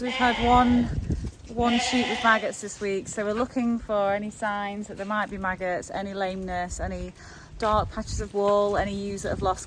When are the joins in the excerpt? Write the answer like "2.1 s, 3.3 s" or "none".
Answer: none